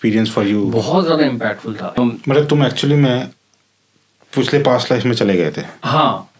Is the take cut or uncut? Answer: cut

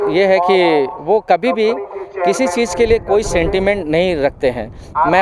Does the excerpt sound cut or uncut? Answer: uncut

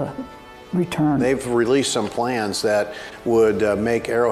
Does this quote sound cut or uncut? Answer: cut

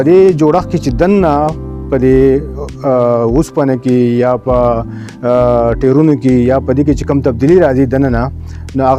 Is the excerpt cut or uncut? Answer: uncut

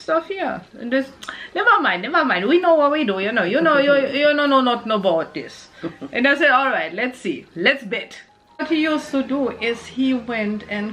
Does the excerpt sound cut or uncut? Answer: cut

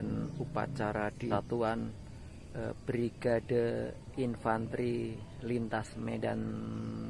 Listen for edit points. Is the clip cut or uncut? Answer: cut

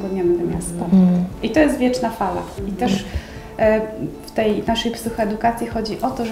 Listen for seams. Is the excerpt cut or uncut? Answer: uncut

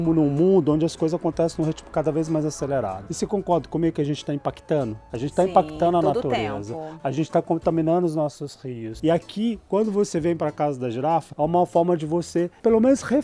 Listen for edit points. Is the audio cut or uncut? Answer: cut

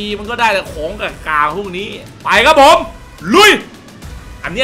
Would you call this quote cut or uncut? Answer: cut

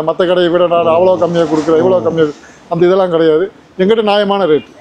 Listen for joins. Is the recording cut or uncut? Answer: uncut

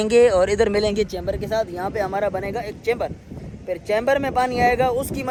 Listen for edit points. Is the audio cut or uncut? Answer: uncut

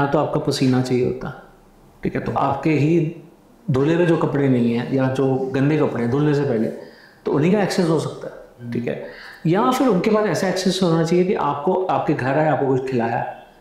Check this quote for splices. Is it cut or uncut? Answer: uncut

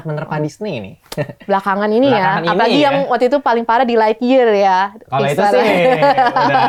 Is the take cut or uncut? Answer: uncut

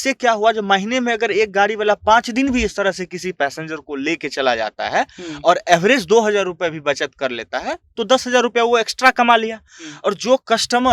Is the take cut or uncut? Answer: uncut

